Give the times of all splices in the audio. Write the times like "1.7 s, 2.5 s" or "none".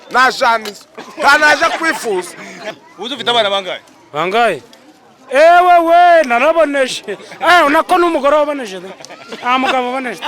2.7 s